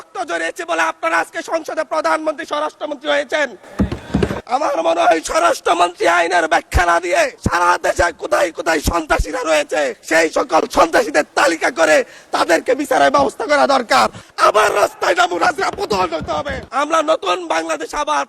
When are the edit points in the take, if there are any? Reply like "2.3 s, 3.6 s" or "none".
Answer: 4.4 s, 7.4 s, 10.0 s, 14.2 s, 16.7 s